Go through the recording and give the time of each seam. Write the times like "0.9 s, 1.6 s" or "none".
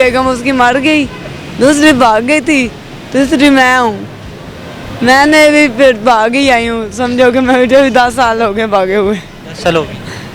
none